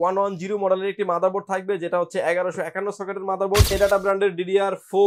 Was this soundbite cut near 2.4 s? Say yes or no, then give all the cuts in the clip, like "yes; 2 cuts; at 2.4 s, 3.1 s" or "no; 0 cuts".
no; 1 cut; at 3.7 s